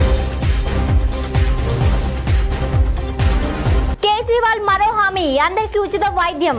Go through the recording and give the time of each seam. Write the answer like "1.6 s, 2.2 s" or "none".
3.9 s